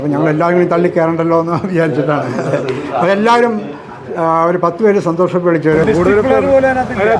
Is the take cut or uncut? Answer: cut